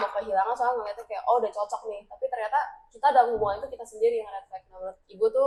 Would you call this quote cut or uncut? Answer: uncut